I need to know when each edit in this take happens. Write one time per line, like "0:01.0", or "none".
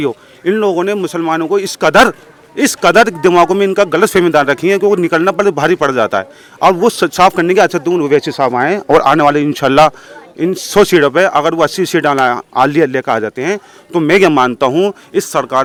none